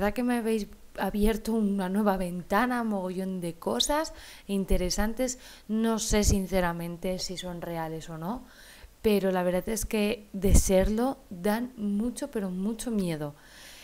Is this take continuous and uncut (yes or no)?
no